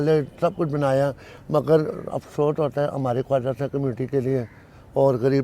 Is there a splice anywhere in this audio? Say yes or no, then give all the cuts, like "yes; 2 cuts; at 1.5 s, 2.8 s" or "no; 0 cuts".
no; 0 cuts